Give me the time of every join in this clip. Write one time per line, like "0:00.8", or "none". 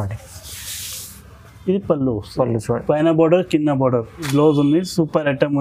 0:04.3